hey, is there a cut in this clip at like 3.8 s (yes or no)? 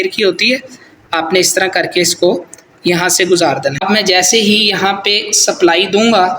yes